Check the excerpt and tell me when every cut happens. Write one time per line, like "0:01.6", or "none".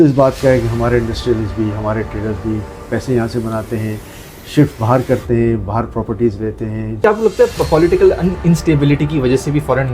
0:07.0